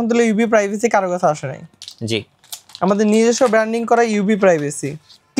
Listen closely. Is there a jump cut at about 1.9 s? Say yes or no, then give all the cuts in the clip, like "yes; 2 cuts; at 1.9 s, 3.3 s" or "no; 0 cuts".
no; 0 cuts